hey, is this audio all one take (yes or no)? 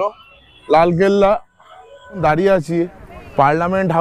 no